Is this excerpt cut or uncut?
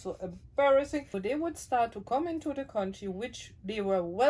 cut